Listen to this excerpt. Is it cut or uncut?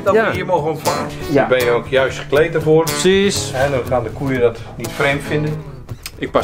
cut